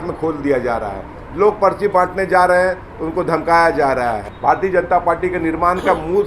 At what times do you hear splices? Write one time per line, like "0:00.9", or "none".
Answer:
0:04.3